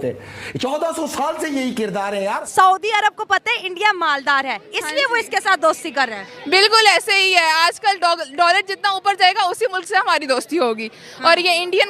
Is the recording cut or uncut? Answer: cut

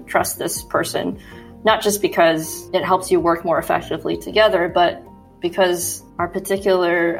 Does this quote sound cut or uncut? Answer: uncut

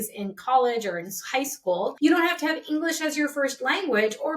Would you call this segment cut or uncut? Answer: cut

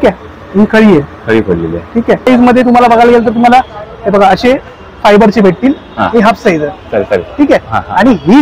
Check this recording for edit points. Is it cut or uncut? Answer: cut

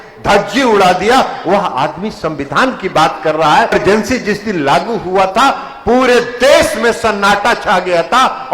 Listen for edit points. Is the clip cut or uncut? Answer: cut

